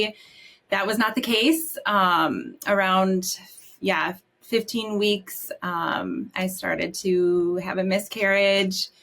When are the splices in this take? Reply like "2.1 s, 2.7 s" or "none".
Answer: none